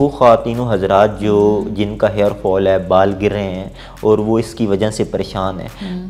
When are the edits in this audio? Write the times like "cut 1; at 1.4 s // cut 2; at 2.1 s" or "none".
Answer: none